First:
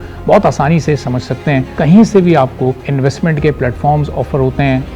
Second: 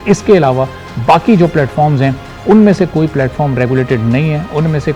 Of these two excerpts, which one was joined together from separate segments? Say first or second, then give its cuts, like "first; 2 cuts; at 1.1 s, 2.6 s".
first; 2 cuts; at 1.7 s, 2.9 s